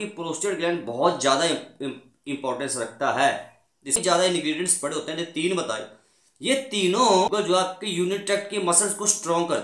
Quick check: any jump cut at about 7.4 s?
yes; 2 cuts; at 4.0 s, 7.4 s

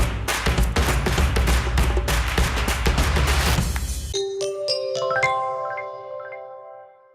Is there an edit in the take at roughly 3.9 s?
yes; 1 cut; at 3.9 s

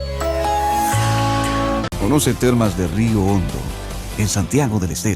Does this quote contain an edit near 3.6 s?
no; 1 cut; at 1.9 s

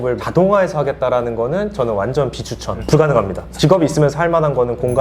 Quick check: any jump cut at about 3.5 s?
yes; 2 cuts; at 2.8 s, 3.5 s

